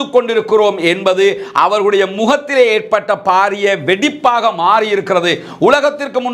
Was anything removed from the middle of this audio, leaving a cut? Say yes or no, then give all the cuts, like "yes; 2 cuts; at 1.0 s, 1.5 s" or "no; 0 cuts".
no; 0 cuts